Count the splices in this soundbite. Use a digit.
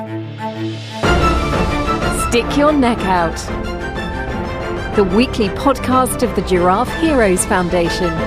0